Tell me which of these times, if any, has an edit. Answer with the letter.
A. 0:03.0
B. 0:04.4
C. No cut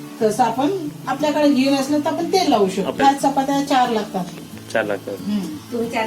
A